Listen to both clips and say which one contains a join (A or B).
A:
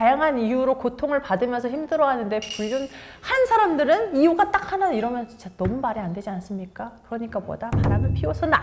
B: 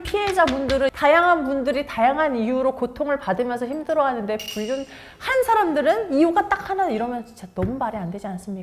B